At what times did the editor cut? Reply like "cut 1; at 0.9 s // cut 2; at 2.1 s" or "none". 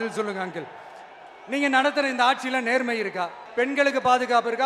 cut 1; at 3.4 s